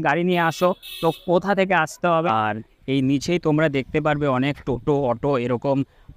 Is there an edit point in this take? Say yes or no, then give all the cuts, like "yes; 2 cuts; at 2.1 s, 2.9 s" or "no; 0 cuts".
yes; 1 cut; at 2.1 s